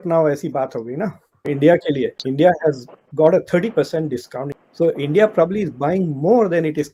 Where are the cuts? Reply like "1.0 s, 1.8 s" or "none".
none